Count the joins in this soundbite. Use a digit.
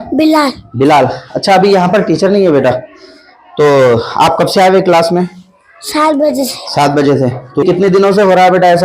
1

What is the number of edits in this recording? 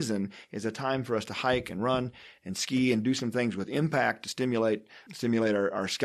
1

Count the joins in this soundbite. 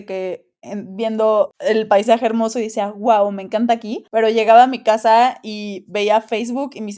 2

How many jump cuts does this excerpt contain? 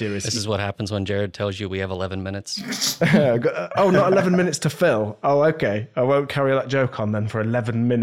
0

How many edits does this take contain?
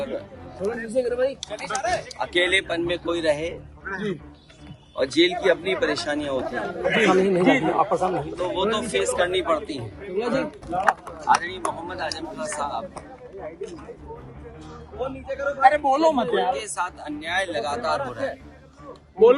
1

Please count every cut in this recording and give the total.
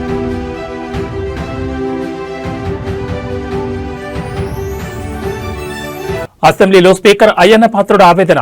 1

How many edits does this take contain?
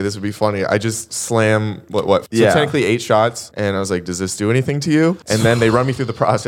3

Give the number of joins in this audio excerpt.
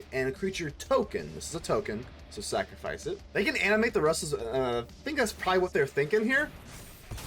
1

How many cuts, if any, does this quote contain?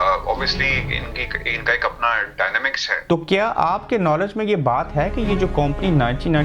1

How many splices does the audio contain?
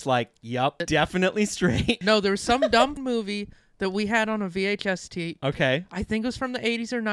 3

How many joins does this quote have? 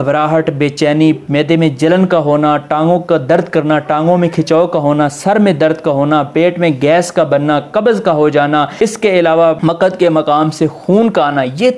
2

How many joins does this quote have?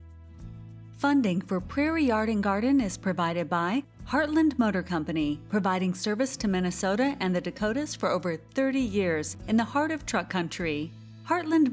1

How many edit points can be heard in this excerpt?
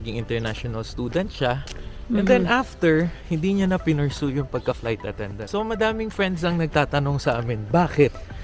1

